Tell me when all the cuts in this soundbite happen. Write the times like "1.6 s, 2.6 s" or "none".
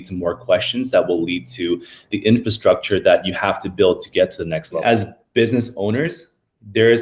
4.8 s